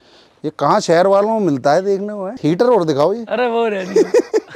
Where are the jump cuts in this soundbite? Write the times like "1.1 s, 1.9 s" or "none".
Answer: 2.4 s